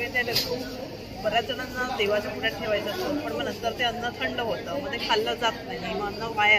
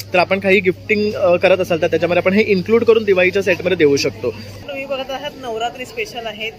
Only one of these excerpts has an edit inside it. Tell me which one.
second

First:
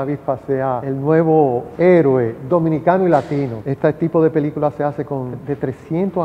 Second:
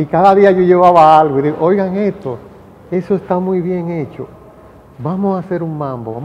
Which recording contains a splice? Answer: first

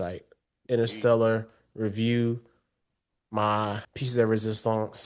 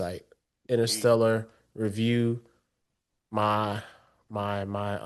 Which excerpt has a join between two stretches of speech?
first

